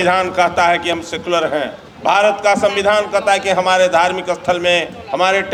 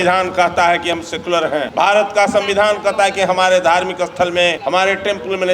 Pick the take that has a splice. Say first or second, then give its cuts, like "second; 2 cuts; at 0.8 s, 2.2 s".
second; 2 cuts; at 1.7 s, 4.6 s